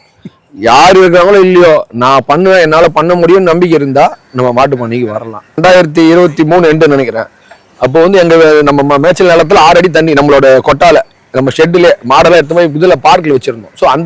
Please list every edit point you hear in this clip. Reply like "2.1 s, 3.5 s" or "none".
5.6 s